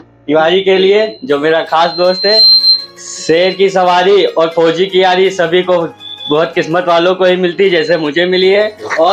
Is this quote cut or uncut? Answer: uncut